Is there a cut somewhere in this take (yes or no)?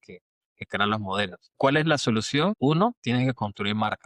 yes